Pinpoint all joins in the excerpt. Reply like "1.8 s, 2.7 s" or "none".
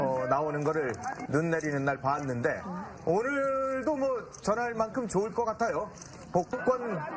3.7 s